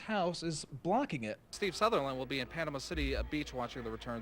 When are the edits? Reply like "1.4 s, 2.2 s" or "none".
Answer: 1.5 s